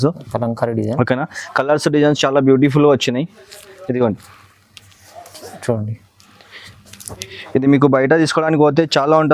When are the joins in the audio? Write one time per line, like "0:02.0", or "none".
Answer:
none